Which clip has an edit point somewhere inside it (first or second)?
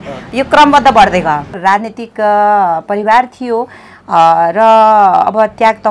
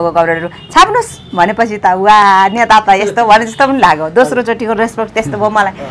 first